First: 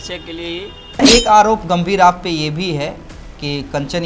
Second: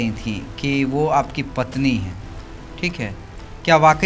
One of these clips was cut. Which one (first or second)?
first